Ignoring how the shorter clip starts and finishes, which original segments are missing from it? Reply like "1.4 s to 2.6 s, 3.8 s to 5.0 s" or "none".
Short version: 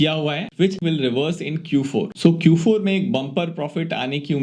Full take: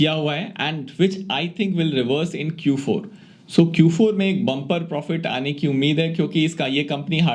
0.8 s to 1.7 s, 3.1 s to 3.5 s